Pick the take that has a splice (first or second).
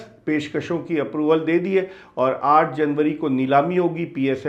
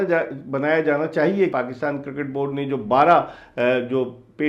second